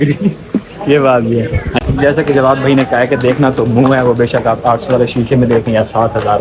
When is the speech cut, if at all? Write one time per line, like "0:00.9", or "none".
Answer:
none